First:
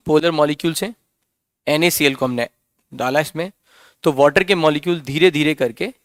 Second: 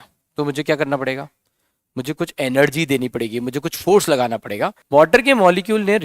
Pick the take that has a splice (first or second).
second